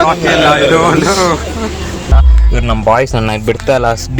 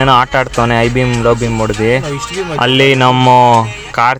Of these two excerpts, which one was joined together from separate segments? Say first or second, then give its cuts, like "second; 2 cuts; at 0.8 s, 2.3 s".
first; 1 cut; at 2.0 s